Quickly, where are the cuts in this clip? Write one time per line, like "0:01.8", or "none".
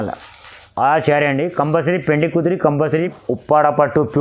0:03.1

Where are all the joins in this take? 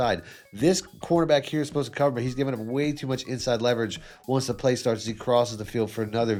none

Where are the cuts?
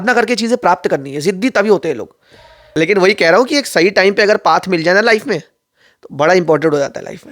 0:02.5

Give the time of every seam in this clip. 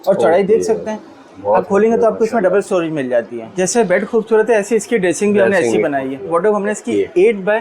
0:03.5
0:06.3

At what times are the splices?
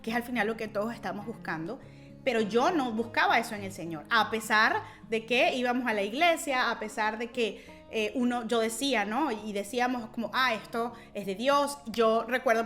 none

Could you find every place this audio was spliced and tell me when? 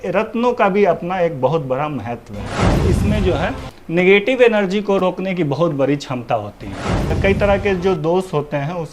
0:02.7
0:07.1

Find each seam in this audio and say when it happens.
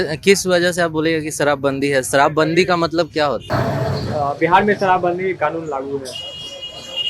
0:03.4

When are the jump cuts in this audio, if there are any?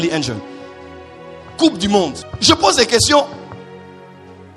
0:02.3

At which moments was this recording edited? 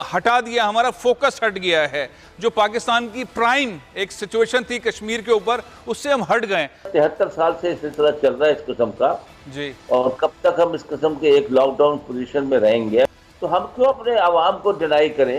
0:06.9
0:13.1

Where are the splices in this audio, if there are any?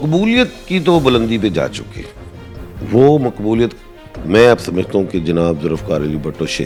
none

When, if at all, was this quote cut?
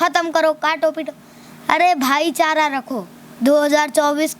0:03.4

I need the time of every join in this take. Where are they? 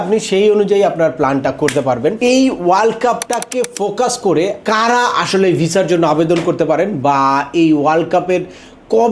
0:02.2
0:03.3
0:04.6

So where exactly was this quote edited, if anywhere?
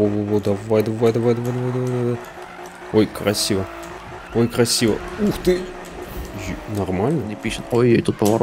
0:07.5

